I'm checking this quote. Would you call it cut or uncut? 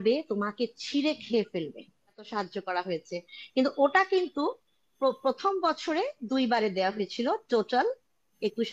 cut